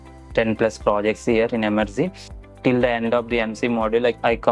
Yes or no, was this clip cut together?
yes